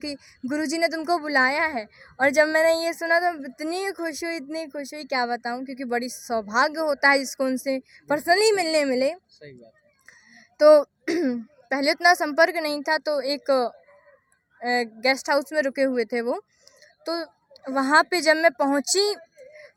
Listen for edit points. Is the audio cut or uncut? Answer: uncut